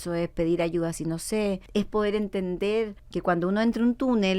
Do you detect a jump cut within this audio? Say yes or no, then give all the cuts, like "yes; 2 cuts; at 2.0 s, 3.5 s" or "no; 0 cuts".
yes; 2 cuts; at 1.6 s, 3.0 s